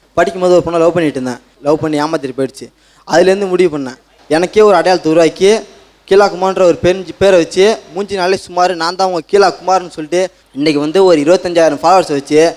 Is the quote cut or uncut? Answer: uncut